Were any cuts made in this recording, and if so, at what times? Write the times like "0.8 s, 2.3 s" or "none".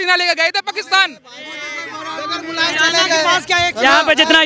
none